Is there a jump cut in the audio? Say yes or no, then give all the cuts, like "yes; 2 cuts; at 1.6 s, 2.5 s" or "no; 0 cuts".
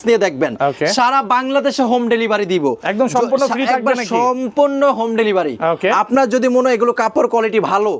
no; 0 cuts